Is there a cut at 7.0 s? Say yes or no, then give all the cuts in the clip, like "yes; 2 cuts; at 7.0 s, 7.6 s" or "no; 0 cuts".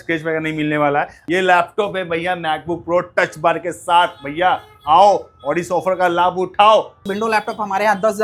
yes; 2 cuts; at 1.2 s, 7.0 s